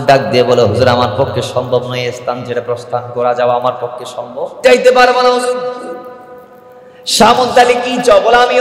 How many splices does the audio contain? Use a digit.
1